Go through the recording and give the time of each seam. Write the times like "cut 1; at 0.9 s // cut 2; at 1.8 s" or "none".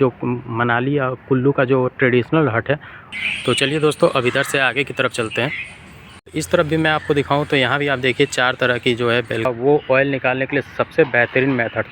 cut 1; at 3.1 s // cut 2; at 6.0 s // cut 3; at 9.5 s